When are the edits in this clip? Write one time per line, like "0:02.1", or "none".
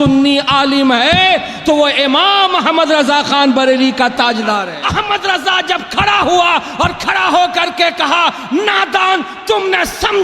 0:04.8